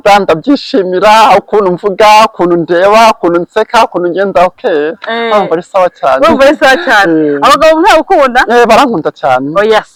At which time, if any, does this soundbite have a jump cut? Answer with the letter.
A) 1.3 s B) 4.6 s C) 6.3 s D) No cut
D